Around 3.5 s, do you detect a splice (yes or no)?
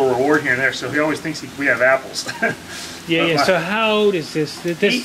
no